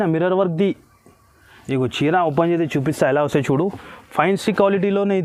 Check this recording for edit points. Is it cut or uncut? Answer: uncut